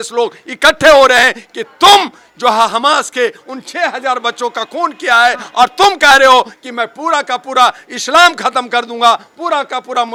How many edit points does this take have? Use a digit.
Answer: 0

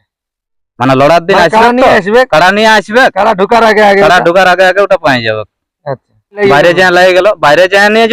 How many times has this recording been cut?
1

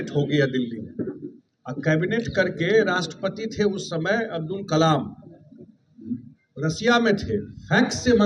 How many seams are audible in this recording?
0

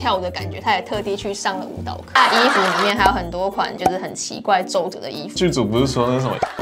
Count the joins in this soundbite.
2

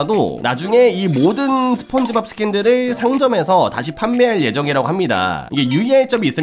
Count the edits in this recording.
1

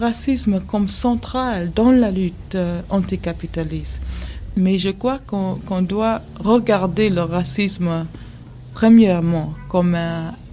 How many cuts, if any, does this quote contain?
1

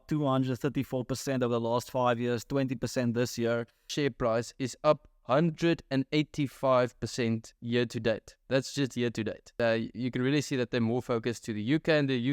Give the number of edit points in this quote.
2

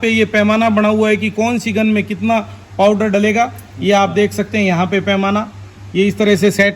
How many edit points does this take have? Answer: 0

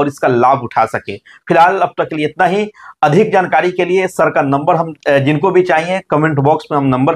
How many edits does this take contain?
0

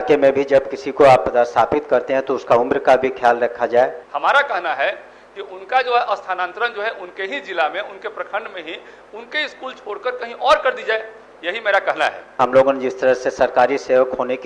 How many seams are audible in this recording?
2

